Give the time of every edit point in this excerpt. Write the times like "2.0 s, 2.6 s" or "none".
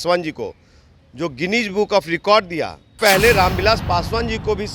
3.0 s